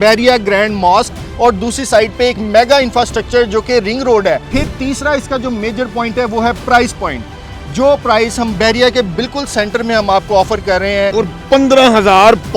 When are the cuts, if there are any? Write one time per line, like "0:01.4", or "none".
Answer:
0:04.5
0:11.1